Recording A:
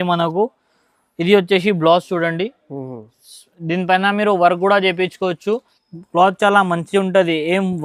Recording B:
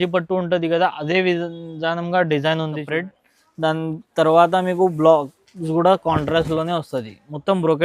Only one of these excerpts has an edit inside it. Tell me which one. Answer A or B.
B